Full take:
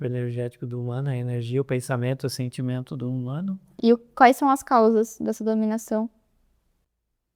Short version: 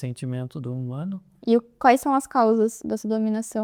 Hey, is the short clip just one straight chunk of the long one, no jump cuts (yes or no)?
yes